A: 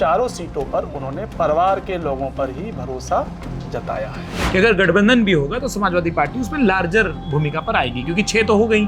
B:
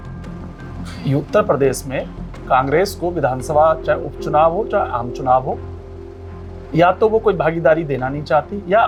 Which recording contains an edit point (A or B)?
A